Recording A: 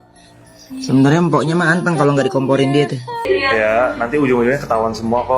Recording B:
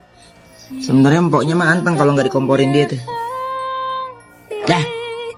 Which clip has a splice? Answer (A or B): A